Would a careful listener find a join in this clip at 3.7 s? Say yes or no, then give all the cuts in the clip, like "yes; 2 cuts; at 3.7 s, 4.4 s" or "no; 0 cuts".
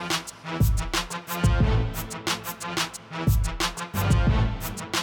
yes; 2 cuts; at 1.2 s, 3.7 s